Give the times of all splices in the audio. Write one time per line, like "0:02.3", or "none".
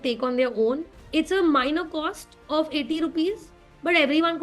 0:00.9